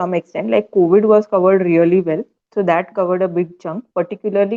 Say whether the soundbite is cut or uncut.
uncut